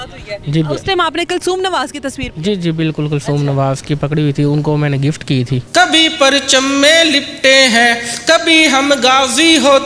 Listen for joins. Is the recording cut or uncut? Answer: cut